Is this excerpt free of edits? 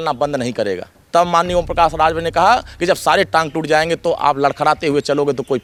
yes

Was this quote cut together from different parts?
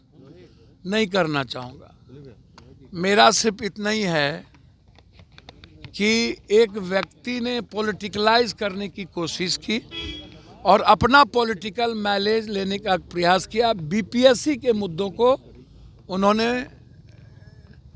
no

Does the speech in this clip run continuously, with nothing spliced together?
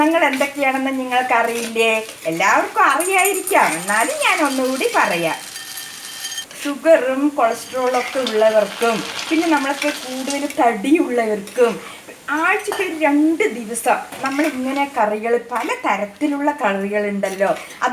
no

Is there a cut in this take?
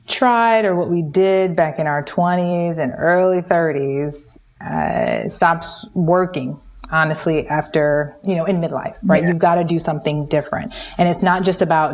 no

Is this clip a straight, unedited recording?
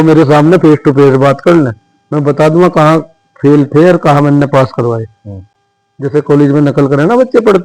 yes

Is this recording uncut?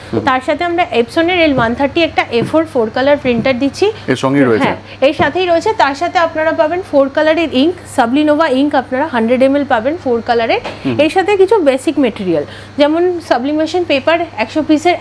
yes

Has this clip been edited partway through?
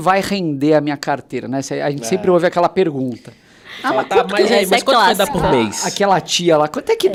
no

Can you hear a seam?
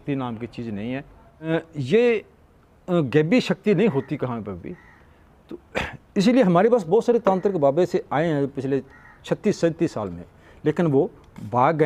no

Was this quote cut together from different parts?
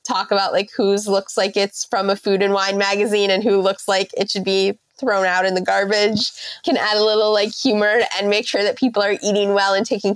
no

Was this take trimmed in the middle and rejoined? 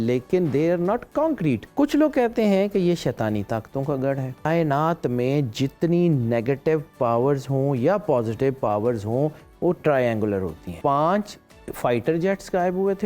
yes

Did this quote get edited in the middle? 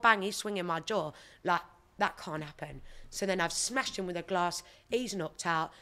no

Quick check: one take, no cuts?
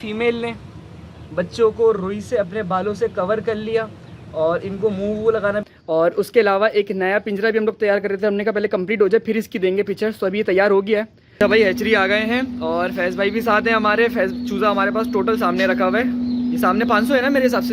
no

